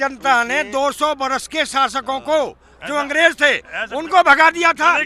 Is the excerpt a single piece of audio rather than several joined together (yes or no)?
yes